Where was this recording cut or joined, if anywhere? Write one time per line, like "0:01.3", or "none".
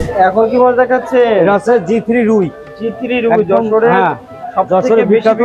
none